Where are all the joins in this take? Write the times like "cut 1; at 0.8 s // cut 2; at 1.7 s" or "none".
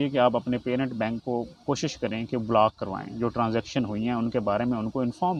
none